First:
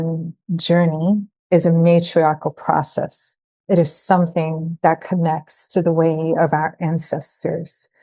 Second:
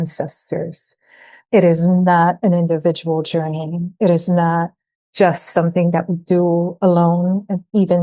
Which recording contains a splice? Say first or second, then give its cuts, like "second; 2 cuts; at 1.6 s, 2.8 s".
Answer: first; 1 cut; at 1.3 s